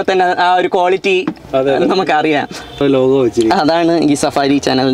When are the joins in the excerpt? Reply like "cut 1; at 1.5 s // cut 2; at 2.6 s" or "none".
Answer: cut 1; at 2.8 s